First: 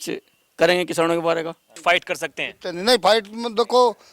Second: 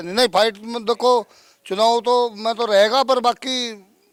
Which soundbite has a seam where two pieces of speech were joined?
first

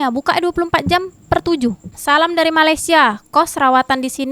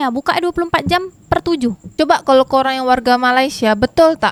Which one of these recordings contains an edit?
first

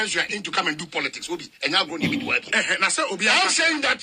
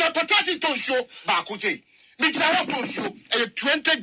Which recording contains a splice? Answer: first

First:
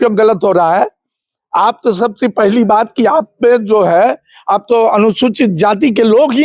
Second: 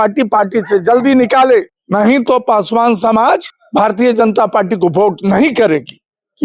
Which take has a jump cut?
second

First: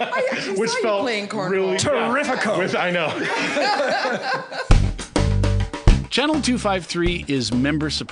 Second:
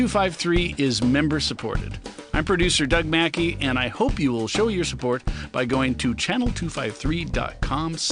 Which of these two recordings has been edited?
first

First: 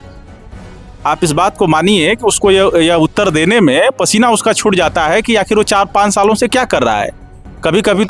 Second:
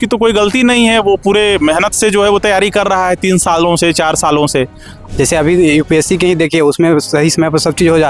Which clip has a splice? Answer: second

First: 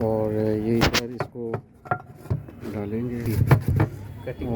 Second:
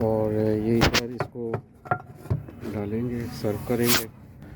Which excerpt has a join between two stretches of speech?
first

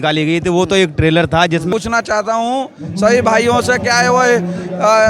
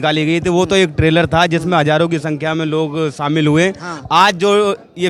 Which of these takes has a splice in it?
first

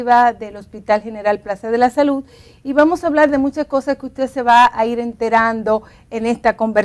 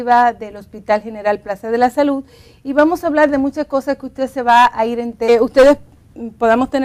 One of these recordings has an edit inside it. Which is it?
first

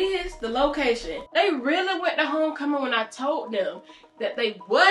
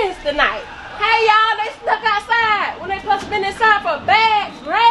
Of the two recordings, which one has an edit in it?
first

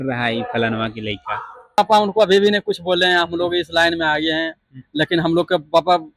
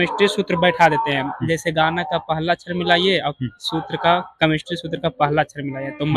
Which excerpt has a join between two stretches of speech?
first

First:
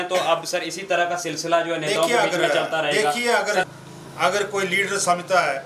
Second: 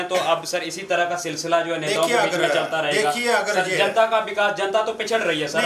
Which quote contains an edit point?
first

